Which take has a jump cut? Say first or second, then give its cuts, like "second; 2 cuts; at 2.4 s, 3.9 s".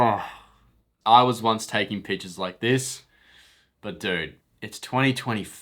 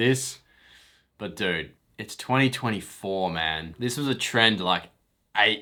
first; 1 cut; at 0.9 s